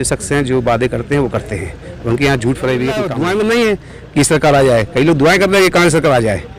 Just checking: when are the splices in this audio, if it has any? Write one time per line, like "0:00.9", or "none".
0:03.1